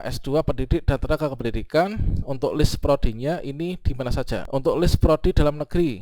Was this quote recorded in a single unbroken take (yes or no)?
no